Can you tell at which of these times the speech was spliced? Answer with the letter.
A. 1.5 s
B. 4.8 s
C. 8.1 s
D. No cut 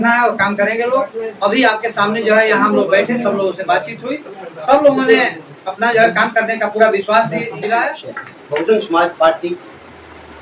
C